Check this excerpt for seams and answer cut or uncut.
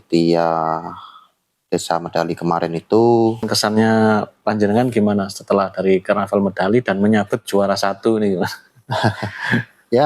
cut